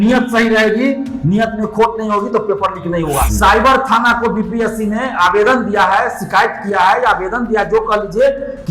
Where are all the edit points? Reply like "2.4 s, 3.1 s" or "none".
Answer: 3.3 s